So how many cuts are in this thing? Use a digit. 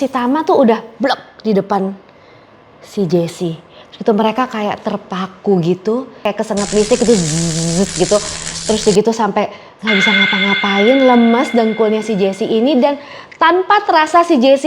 1